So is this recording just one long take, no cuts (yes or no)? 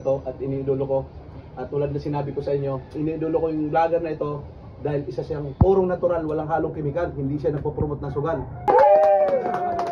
no